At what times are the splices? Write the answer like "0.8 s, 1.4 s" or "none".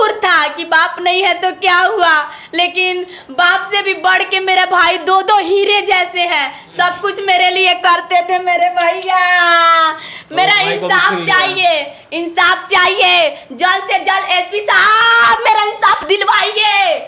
none

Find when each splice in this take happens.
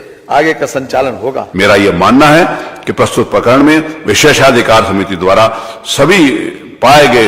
1.4 s

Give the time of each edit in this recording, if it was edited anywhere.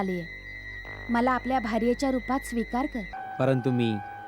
3.2 s

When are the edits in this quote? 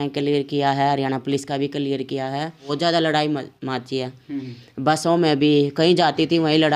2.7 s

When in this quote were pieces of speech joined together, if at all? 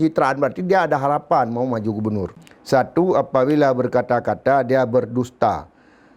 2.3 s

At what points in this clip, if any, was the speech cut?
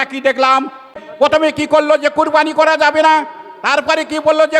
1.0 s

